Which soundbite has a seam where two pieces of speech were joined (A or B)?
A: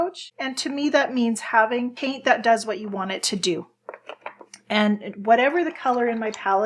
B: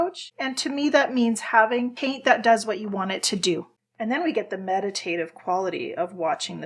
B